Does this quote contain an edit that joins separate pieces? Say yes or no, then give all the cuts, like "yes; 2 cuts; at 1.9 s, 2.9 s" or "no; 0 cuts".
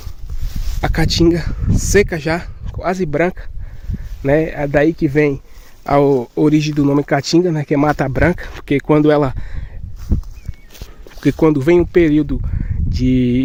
no; 0 cuts